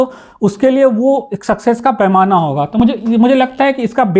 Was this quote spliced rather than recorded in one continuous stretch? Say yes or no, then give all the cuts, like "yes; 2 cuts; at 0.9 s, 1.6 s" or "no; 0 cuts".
no; 0 cuts